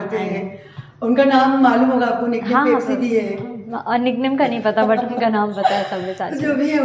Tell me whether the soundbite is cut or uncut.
uncut